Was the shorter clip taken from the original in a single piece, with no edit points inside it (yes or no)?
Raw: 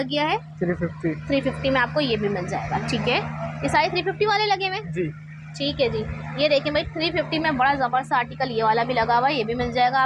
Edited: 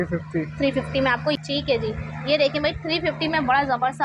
no